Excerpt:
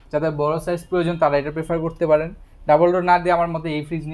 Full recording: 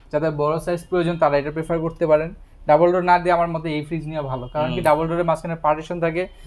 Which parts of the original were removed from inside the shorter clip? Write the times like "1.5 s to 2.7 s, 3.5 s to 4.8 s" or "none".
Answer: none